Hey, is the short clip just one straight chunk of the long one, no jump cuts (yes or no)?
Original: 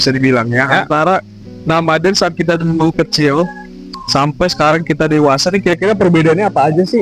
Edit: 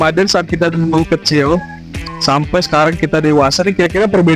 yes